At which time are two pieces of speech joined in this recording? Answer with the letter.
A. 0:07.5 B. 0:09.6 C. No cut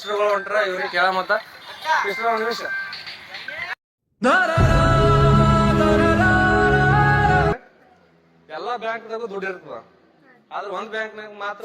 A